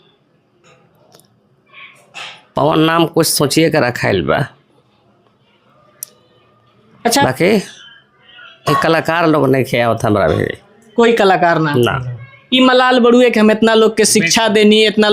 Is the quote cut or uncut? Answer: cut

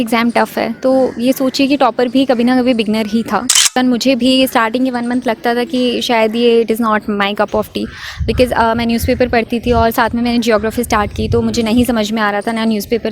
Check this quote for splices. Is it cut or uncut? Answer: cut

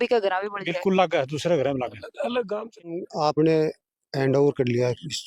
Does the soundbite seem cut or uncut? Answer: cut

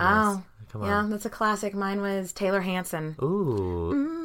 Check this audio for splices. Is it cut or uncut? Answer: cut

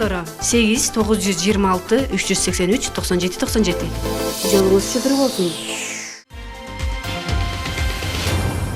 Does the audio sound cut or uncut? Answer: cut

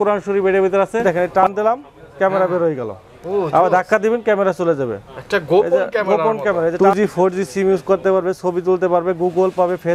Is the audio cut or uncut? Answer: cut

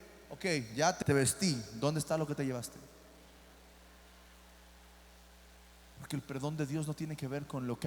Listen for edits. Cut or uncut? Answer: cut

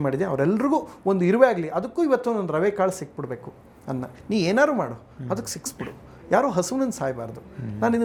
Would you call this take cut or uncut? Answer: uncut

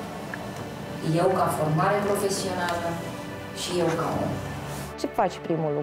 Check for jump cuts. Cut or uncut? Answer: cut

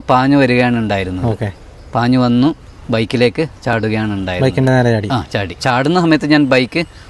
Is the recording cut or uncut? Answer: cut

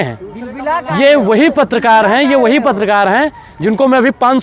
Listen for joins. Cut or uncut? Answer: uncut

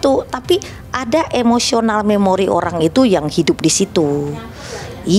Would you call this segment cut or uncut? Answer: uncut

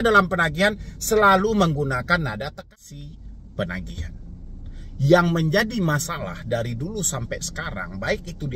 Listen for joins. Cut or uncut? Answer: cut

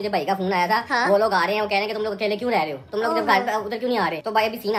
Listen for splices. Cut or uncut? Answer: uncut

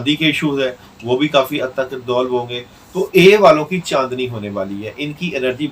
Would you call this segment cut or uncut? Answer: uncut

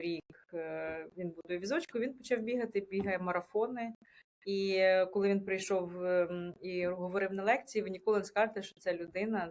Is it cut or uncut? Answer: uncut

